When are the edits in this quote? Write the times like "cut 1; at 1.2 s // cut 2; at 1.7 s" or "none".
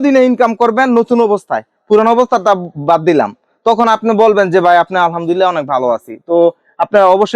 none